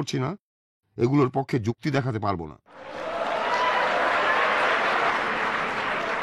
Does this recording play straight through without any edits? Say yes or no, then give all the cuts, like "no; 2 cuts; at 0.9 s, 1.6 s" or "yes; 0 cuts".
no; 2 cuts; at 2.9 s, 5.1 s